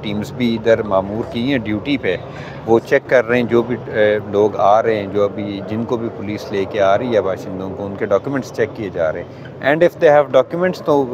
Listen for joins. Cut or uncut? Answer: uncut